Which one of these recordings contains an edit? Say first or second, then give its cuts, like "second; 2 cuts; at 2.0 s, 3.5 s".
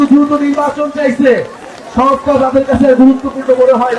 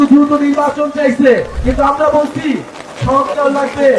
second; 1 cut; at 1.5 s